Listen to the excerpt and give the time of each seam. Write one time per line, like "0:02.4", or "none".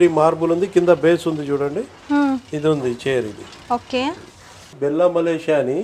0:04.7